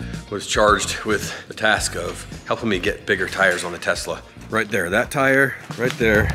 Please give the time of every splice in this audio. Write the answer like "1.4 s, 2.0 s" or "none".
1.4 s, 2.3 s, 4.3 s